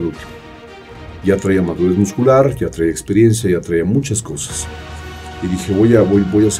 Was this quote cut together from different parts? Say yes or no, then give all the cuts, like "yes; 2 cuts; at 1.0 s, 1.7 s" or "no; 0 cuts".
no; 0 cuts